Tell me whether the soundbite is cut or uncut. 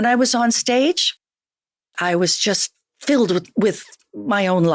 uncut